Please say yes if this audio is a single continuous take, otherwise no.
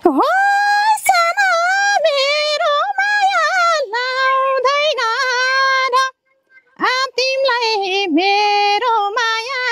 yes